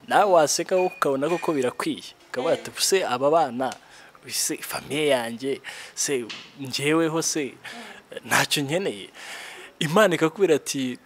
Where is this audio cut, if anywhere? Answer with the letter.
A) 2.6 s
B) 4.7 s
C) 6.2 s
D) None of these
D